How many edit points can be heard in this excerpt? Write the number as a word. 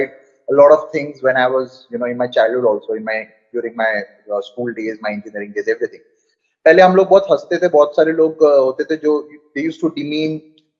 one